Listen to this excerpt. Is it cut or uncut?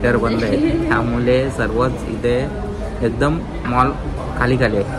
uncut